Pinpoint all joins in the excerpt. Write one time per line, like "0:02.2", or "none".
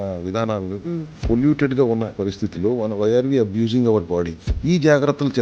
0:01.2
0:04.5